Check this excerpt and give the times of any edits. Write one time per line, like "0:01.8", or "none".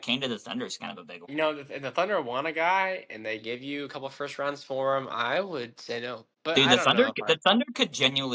0:01.3
0:06.5